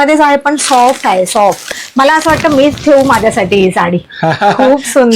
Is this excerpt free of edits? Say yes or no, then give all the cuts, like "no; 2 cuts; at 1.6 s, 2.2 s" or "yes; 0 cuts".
no; 1 cut; at 1.8 s